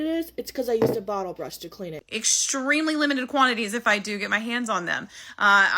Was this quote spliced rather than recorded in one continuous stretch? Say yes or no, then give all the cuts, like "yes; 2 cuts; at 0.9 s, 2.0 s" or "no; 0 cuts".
yes; 1 cut; at 1.9 s